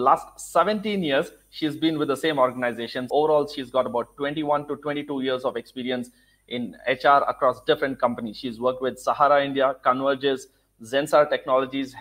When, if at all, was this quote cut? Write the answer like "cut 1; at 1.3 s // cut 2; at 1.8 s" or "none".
cut 1; at 2.9 s